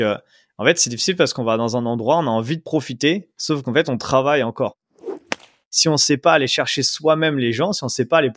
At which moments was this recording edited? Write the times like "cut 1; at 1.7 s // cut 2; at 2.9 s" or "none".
cut 1; at 5.4 s